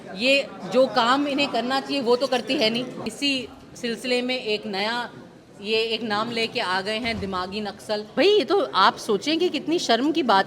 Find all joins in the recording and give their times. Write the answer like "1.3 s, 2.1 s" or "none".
3.1 s, 8.1 s